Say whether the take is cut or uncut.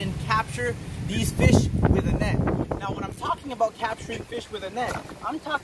uncut